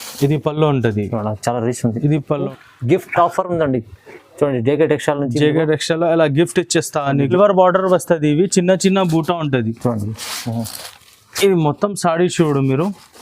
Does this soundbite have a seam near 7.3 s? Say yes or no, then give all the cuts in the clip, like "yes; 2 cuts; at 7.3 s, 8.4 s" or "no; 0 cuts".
yes; 2 cuts; at 2.5 s, 7.3 s